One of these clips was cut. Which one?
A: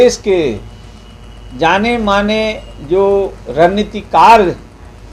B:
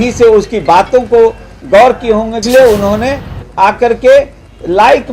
B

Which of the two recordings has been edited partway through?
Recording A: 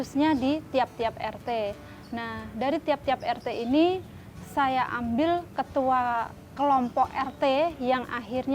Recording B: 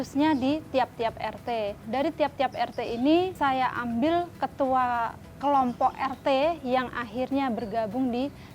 B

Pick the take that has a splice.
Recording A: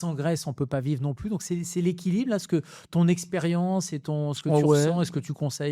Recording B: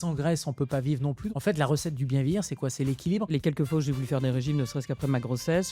B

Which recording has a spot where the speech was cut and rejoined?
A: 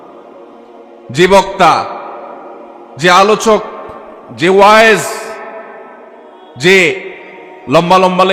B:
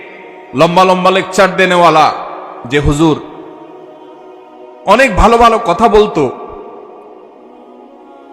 B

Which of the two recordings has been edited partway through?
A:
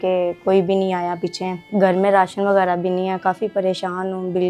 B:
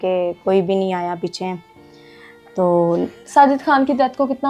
A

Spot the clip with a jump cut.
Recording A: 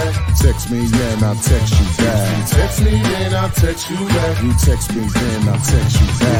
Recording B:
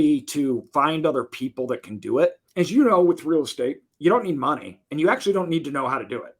B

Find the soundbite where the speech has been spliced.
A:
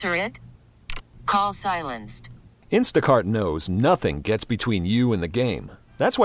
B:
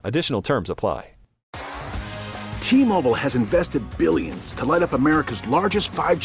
B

